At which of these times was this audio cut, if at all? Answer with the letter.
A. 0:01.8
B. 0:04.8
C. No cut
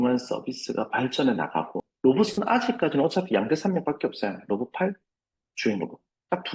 A